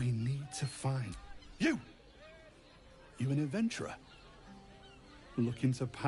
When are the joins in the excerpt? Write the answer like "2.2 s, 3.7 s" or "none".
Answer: 1.1 s